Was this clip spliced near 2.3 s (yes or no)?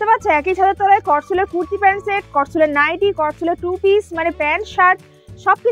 no